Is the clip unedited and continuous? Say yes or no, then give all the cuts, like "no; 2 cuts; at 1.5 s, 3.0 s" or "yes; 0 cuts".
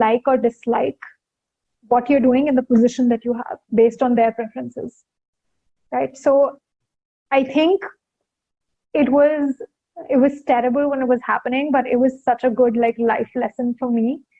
yes; 0 cuts